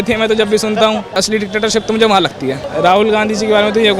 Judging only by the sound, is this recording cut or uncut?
cut